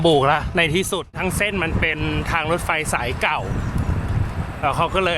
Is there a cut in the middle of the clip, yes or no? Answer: yes